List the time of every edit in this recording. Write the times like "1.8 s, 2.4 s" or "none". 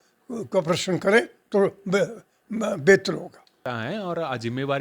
3.6 s